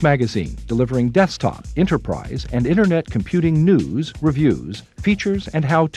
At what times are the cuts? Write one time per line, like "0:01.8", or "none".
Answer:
none